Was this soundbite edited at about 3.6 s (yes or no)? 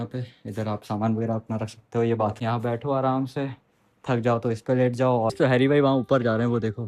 no